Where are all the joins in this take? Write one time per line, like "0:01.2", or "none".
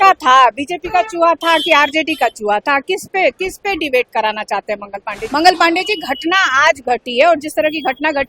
0:05.2